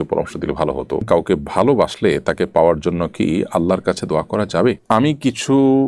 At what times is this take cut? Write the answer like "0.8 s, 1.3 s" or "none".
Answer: 1.0 s, 4.8 s